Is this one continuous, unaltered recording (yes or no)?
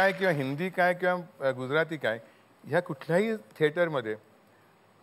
yes